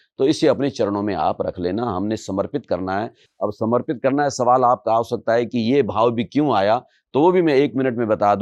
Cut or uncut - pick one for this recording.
uncut